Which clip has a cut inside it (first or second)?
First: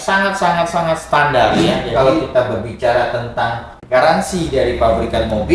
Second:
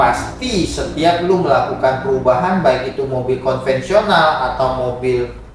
first